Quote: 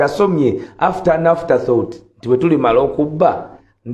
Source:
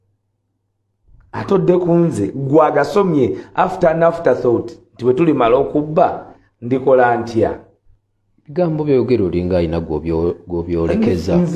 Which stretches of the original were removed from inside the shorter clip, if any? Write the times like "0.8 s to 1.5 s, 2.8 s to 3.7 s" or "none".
none